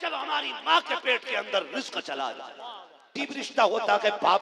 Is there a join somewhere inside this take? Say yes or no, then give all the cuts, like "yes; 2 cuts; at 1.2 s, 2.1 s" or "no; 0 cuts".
yes; 1 cut; at 3.1 s